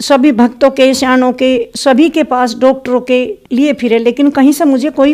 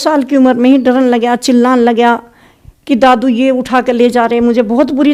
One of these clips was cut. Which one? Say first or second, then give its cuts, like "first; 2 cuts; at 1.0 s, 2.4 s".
first; 1 cut; at 3.4 s